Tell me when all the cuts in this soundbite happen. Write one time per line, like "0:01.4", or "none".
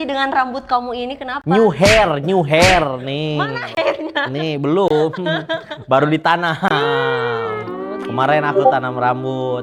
none